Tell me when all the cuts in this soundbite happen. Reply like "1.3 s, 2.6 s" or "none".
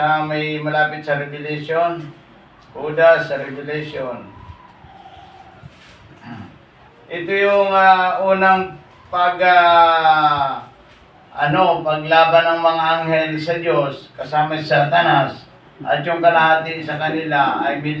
none